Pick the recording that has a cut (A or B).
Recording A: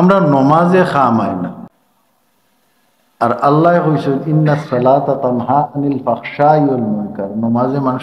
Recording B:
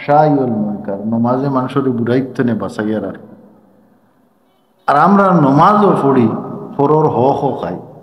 A